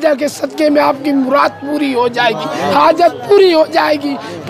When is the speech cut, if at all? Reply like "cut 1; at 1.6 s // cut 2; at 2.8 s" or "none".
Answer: none